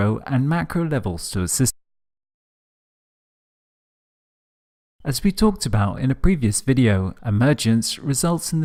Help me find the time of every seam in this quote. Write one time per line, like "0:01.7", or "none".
none